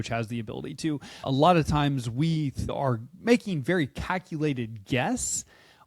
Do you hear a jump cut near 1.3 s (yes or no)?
yes